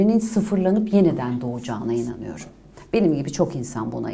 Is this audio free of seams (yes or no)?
yes